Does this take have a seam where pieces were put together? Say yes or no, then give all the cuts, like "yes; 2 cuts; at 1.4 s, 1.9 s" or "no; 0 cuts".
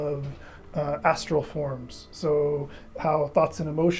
no; 0 cuts